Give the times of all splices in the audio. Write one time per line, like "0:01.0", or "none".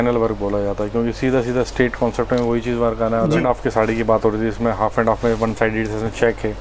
0:03.4